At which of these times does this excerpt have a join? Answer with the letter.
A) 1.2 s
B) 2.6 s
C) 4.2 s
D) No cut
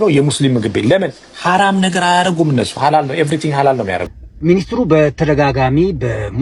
C